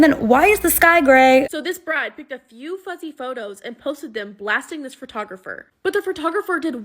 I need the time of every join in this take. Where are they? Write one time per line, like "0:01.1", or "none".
0:01.5